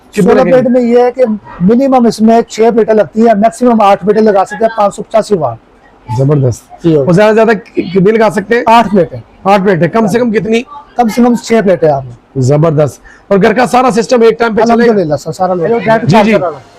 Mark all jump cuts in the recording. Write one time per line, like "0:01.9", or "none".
0:15.6